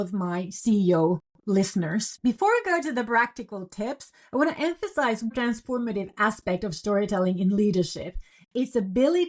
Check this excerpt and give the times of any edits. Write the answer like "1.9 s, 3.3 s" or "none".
2.1 s, 5.3 s